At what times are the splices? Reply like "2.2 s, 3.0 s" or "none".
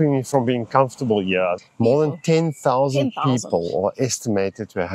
1.7 s